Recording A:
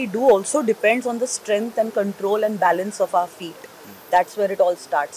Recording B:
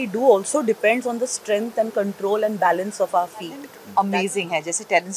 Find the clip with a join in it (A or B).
B